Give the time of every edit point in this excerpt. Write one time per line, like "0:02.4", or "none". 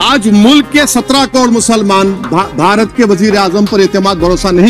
none